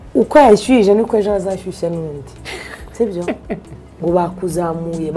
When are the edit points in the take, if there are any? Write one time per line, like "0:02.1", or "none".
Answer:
0:03.9